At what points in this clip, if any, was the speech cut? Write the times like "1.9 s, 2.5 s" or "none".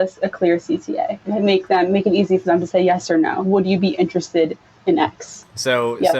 1.2 s, 3.4 s